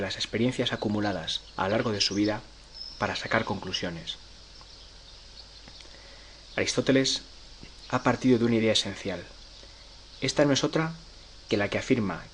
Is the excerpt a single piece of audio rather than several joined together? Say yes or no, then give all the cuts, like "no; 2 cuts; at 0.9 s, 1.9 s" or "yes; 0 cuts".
no; 1 cut; at 2.5 s